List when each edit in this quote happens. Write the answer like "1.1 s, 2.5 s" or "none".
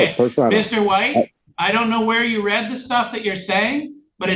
1.5 s